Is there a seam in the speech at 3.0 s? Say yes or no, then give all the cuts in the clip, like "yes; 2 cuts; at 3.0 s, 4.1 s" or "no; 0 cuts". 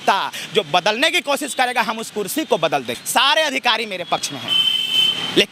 yes; 1 cut; at 3.0 s